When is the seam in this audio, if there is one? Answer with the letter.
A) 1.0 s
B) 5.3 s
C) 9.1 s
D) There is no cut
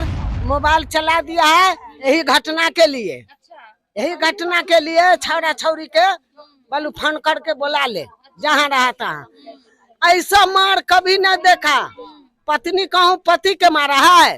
A